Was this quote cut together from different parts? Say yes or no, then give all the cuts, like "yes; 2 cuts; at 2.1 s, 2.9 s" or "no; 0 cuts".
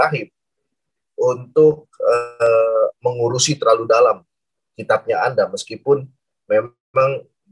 no; 0 cuts